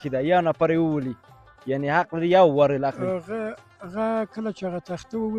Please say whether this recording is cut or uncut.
uncut